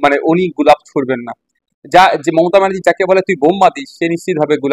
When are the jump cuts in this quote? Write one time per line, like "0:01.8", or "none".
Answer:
none